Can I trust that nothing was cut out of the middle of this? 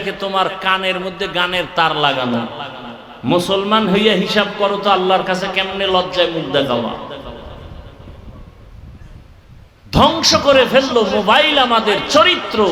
yes; 0 cuts

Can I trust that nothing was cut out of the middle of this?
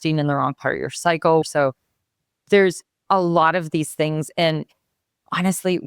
no; 1 cut; at 1.4 s

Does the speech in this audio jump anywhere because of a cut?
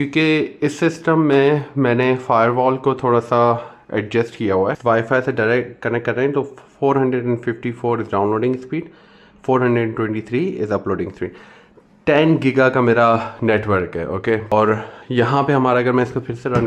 yes; 2 cuts; at 4.8 s, 14.5 s

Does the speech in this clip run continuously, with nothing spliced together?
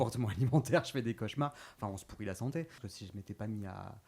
no; 1 cut; at 2.9 s

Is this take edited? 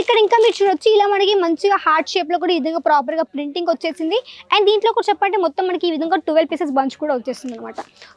no; 0 cuts

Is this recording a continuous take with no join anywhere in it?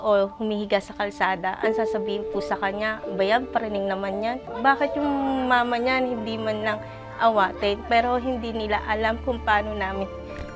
no; 1 cut; at 4.5 s

